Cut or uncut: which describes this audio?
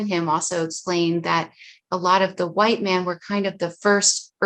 uncut